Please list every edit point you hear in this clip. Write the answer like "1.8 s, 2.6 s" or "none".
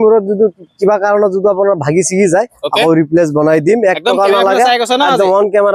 none

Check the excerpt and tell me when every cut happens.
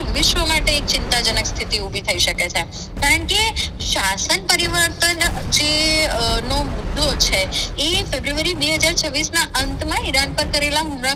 none

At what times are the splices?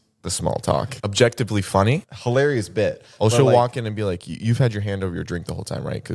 1.0 s, 2.1 s

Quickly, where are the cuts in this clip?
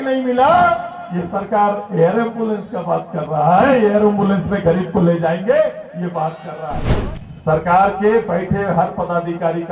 6.9 s

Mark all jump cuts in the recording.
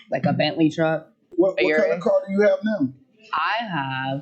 1.3 s

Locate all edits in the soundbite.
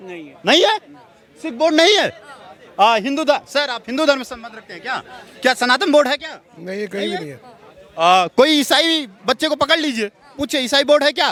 none

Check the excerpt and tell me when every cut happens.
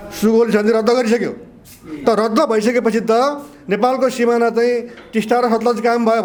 none

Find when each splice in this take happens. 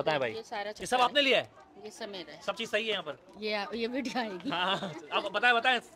none

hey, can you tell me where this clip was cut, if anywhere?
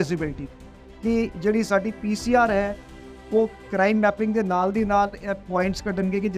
none

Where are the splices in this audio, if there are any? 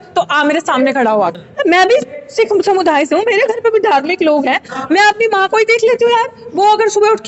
1.3 s

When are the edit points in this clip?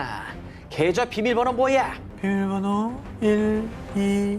2.0 s, 3.1 s

